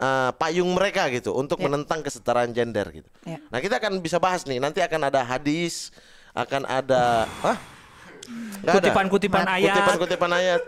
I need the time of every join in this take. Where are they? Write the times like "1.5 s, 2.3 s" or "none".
none